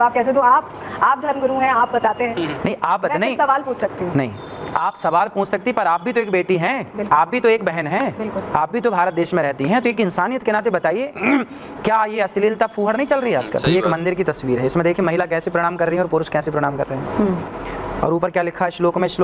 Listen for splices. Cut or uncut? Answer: cut